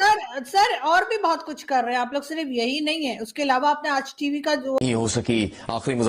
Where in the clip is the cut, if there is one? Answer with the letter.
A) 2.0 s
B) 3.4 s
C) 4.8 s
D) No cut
C